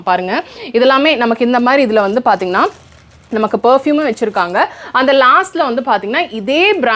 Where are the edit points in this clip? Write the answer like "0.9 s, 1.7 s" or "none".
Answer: none

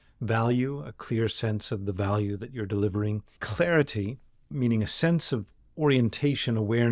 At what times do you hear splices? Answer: 3.3 s

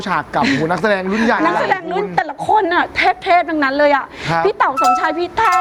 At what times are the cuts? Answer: none

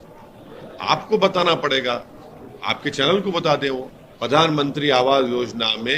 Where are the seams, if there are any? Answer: 3.9 s

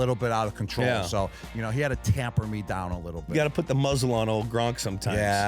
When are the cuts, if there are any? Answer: 3.2 s

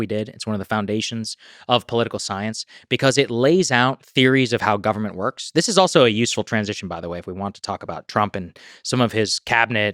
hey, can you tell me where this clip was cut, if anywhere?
none

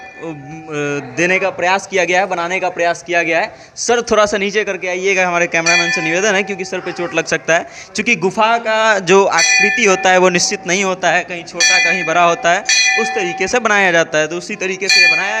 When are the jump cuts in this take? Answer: none

